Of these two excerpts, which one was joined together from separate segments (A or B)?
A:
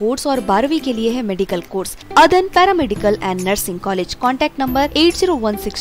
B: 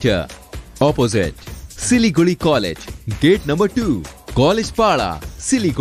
A